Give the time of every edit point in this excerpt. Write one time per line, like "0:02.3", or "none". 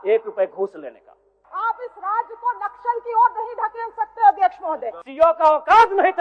0:01.4
0:05.0